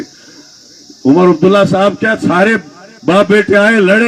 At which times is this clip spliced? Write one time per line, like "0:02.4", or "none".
none